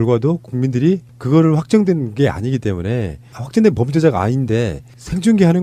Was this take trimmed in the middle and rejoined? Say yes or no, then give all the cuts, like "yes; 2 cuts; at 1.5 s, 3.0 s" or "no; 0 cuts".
yes; 1 cut; at 3.5 s